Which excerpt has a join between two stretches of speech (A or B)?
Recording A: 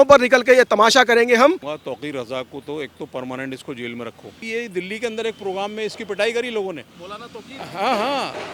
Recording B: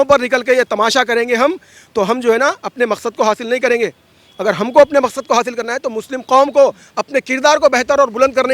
A